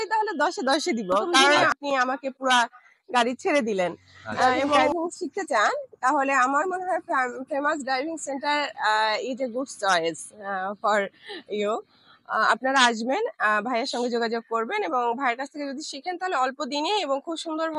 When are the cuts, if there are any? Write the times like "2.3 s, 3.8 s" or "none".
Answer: 1.6 s, 4.8 s

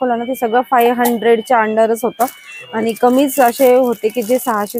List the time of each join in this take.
none

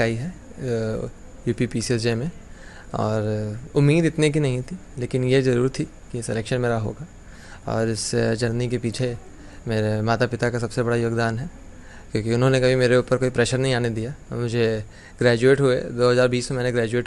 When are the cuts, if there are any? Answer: none

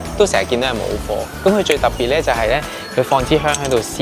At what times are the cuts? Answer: none

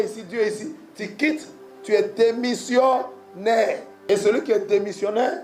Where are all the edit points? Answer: 3.9 s

